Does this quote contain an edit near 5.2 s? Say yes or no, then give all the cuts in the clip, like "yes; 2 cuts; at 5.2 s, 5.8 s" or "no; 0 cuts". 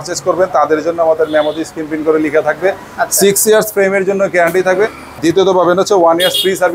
yes; 1 cut; at 5.2 s